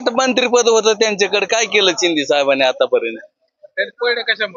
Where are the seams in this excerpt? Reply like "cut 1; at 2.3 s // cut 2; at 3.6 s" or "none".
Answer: none